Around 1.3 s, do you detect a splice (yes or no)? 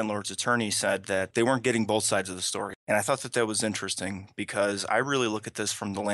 yes